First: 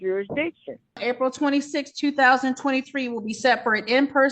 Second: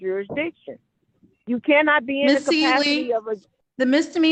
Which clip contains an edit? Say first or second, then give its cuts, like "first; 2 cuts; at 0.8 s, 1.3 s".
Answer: first; 1 cut; at 1.0 s